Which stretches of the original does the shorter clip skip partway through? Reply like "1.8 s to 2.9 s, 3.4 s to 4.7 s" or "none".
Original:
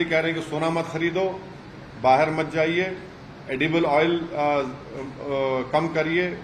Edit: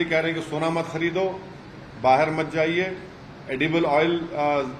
none